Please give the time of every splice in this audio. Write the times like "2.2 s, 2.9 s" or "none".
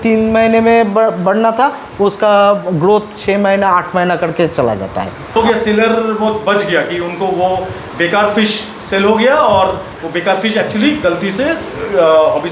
5.4 s